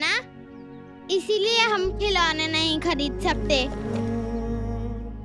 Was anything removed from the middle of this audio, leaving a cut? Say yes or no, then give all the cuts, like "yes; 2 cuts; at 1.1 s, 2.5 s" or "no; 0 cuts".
yes; 1 cut; at 3.7 s